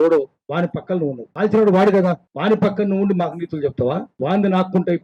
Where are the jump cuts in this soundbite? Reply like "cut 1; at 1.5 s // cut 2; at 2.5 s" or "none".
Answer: cut 1; at 1.2 s // cut 2; at 2.3 s // cut 3; at 4.1 s

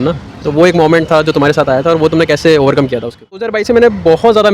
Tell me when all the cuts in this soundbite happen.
cut 1; at 3.5 s

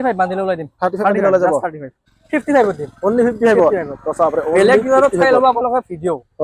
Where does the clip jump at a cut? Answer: cut 1; at 2.2 s

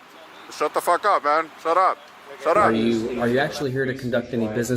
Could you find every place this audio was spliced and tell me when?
cut 1; at 2.7 s

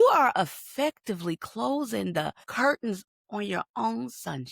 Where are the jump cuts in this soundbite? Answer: cut 1; at 2.4 s // cut 2; at 3.1 s

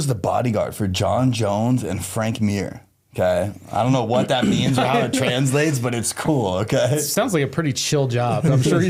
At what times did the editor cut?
none

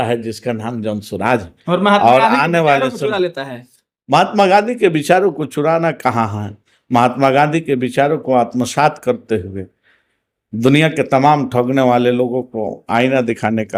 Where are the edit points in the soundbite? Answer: none

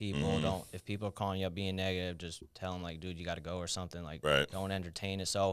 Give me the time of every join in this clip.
none

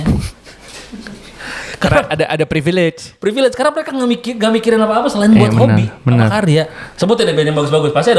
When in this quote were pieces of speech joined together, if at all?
cut 1; at 6.9 s

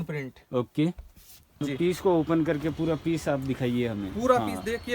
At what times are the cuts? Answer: cut 1; at 1.6 s

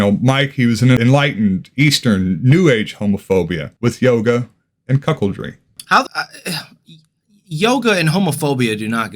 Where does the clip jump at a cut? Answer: cut 1; at 1.0 s // cut 2; at 5.9 s

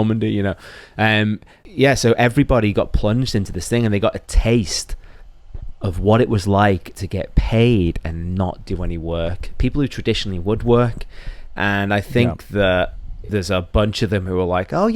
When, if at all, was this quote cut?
cut 1; at 13.1 s

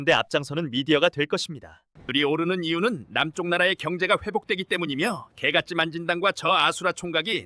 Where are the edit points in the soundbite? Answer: cut 1; at 2.1 s

